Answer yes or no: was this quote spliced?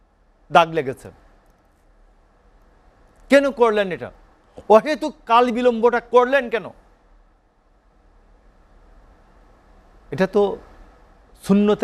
no